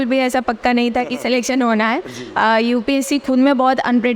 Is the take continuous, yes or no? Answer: yes